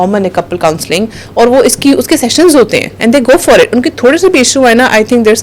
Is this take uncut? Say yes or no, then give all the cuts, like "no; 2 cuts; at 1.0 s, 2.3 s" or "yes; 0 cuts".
yes; 0 cuts